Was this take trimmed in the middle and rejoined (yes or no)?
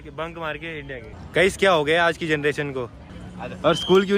yes